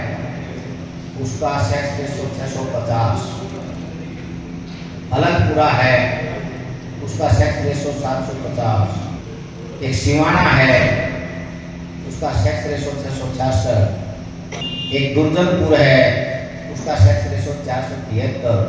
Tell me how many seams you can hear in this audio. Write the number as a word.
two